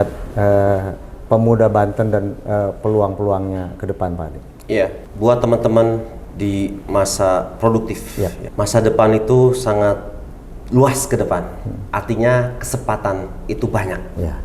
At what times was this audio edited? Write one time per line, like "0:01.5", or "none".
0:05.0
0:08.4

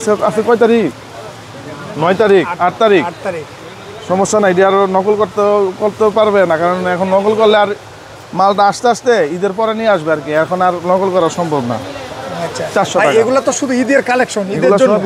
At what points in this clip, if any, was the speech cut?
none

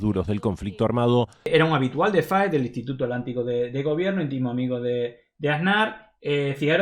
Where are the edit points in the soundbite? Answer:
0:01.5

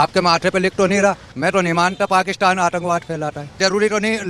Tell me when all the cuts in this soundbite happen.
0:01.3
0:03.6

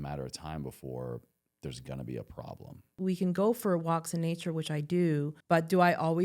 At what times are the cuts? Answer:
0:02.9
0:05.4

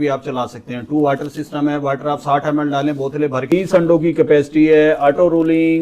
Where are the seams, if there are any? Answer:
0:03.5

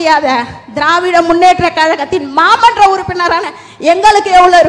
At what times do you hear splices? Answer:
none

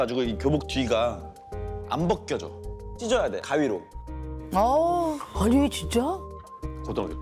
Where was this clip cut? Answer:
none

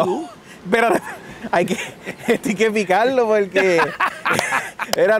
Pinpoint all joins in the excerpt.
none

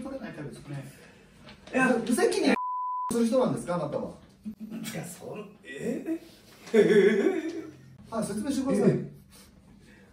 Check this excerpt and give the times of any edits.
none

